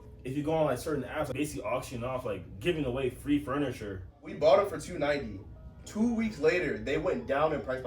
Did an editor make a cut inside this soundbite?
yes; 2 cuts; at 1.3 s, 4.3 s

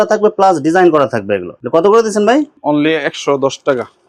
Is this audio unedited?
yes; 0 cuts

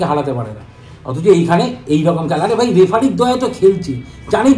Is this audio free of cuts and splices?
yes; 0 cuts

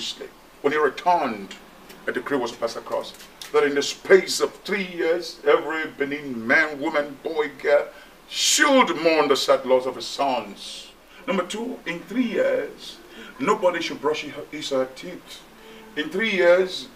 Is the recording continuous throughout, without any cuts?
yes; 0 cuts

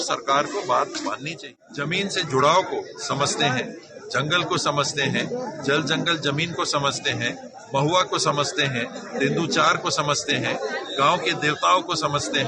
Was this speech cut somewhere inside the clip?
yes; 1 cut; at 1.4 s

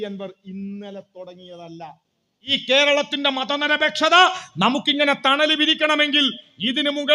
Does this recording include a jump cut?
yes; 1 cut; at 2.6 s

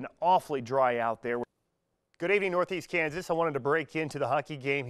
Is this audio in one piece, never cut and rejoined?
no; 1 cut; at 1.5 s

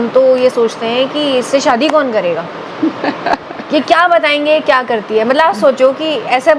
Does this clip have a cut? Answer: no; 0 cuts

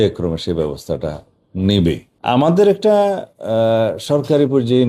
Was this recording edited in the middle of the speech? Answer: yes; 1 cut; at 2.1 s

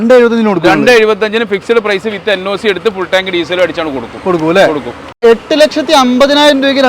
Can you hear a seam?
yes; 1 cut; at 5.2 s

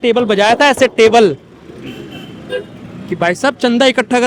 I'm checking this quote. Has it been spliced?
no; 0 cuts

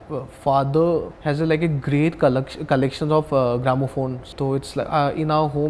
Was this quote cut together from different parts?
yes; 2 cuts; at 1.1 s, 4.2 s

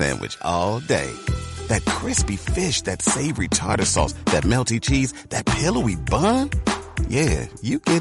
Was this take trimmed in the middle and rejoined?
no; 0 cuts

